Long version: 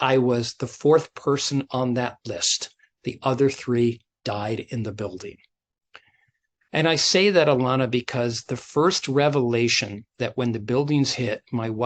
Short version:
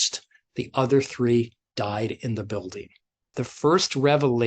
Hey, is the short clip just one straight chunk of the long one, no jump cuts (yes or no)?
no